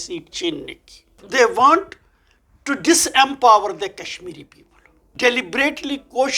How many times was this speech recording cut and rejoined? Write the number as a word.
two